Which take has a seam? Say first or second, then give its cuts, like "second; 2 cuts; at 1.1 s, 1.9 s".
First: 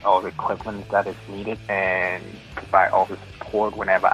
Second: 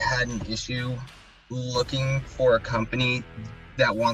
first; 2 cuts; at 1.5 s, 3.2 s